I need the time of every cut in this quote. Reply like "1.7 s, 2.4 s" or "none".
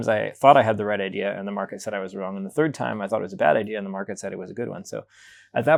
none